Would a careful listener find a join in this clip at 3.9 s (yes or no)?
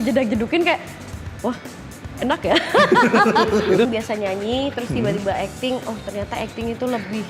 yes